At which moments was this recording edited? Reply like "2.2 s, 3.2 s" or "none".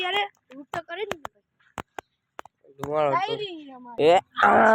2.8 s, 3.8 s